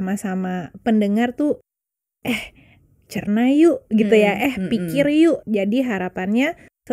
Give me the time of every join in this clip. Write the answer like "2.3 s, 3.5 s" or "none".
5.4 s